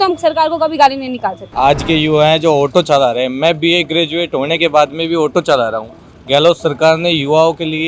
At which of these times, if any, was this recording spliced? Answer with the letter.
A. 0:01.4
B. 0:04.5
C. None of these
A